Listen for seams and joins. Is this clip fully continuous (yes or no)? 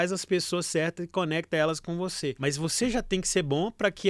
no